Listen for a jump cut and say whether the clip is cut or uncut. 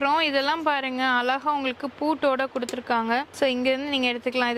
uncut